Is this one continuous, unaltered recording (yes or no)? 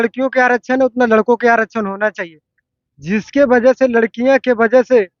yes